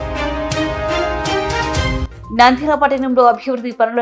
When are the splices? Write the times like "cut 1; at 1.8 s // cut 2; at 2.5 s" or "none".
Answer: cut 1; at 2.0 s